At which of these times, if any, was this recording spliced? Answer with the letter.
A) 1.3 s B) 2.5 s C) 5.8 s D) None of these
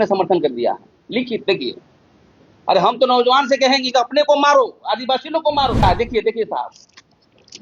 C